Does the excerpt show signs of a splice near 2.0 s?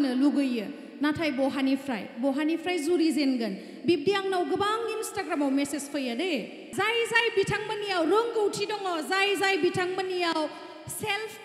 no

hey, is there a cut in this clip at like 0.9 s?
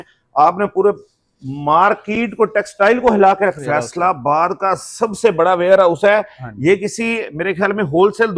no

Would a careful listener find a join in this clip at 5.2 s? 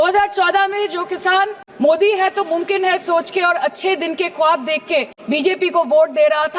yes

